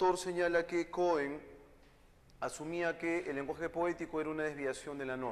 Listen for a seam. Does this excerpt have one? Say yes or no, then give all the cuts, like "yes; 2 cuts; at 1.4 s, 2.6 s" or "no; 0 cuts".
yes; 1 cut; at 1.2 s